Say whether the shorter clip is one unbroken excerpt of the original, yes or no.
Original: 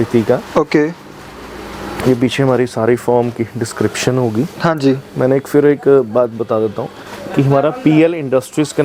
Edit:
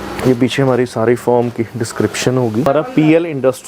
no